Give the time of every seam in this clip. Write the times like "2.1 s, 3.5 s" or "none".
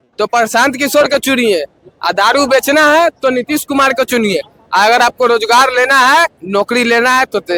none